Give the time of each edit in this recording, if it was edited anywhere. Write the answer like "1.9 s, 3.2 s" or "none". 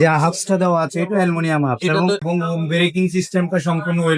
2.2 s

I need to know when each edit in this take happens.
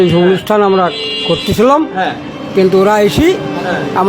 none

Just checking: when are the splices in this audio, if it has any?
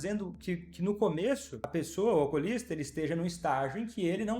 1.5 s

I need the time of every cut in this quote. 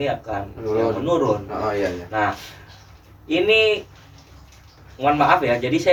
none

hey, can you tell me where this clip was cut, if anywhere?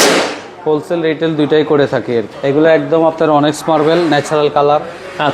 2.3 s

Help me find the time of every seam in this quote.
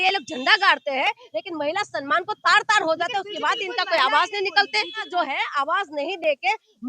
5.1 s

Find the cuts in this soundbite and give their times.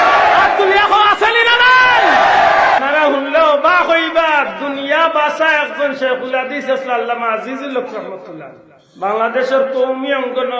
none

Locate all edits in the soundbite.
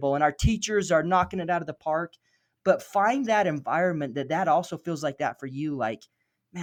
none

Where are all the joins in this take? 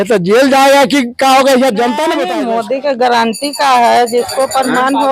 2.3 s

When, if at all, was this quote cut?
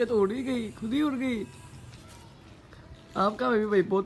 1.9 s

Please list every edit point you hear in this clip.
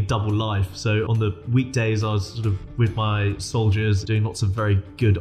1.1 s, 4.0 s

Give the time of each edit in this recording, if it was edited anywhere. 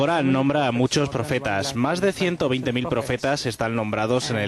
0.9 s

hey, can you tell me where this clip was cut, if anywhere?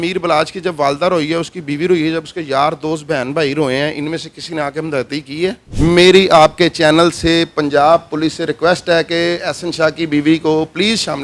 5.6 s

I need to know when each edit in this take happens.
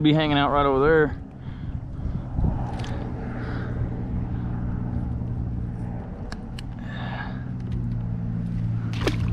none

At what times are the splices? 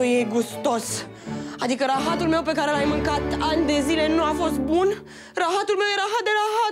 none

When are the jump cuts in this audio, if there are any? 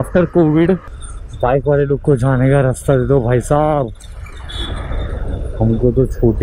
0.9 s

